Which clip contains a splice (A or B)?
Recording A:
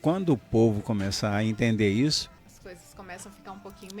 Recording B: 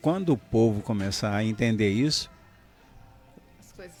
A